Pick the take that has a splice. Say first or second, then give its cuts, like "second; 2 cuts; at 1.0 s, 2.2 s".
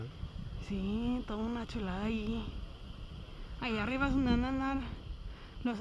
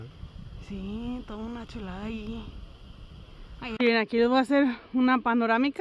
second; 1 cut; at 3.7 s